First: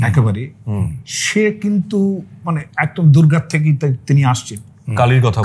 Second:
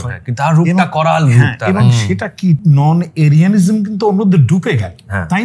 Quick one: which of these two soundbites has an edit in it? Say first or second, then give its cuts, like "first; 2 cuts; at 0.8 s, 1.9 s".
second; 1 cut; at 2.6 s